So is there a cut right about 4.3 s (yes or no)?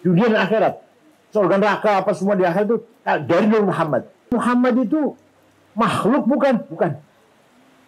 yes